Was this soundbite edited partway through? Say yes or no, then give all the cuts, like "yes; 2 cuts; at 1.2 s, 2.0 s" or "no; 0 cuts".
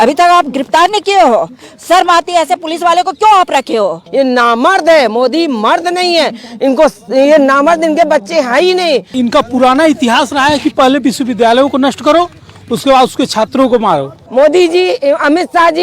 yes; 3 cuts; at 4.0 s, 9.1 s, 14.2 s